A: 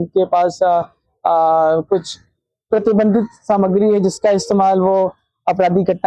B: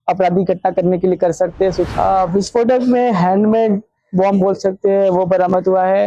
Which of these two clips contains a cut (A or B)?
B